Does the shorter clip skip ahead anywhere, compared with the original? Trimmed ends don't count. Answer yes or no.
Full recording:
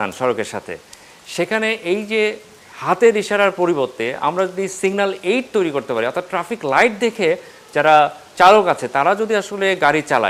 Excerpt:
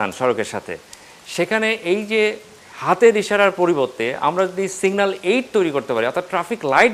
no